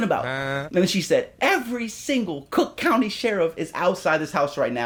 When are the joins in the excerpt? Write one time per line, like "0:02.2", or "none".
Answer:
none